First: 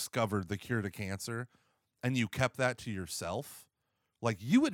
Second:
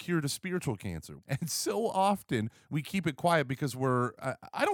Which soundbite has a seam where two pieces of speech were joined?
second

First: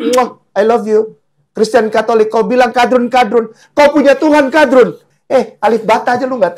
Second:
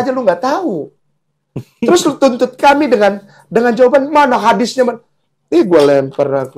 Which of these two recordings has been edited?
first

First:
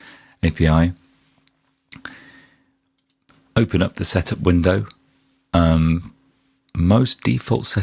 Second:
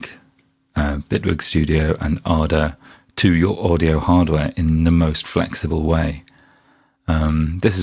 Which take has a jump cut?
second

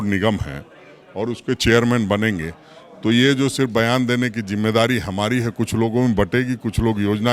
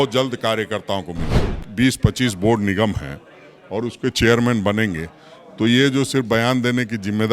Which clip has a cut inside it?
second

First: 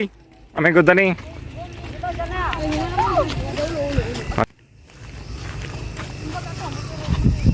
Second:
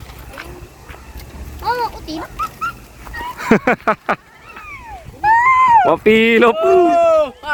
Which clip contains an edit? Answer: first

